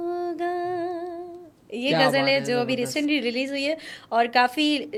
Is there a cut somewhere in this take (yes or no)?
no